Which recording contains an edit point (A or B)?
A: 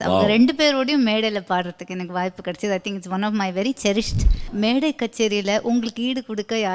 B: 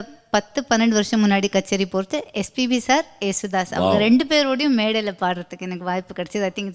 A